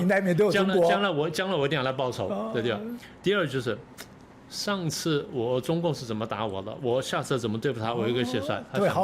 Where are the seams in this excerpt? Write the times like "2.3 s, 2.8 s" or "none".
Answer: none